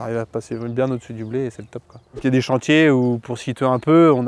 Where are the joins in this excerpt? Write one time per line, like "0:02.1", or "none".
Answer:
0:02.2